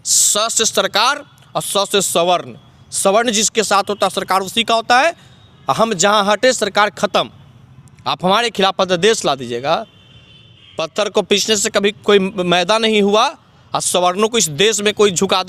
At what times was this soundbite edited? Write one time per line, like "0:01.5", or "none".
none